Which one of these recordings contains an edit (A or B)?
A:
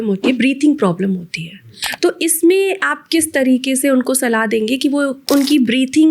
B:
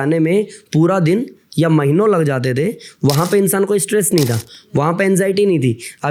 A